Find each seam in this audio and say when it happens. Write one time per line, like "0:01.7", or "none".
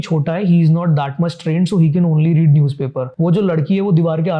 0:03.0